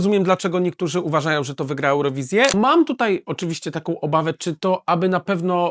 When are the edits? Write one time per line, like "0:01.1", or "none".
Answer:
0:02.5